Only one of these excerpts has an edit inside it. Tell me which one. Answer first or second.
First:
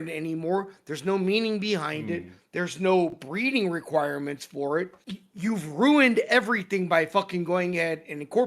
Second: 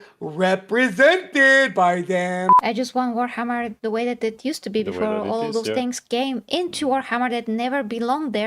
second